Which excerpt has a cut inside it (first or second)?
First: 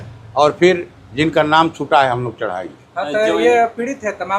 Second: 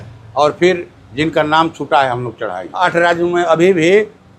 second